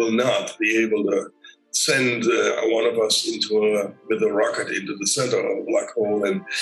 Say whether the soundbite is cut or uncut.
uncut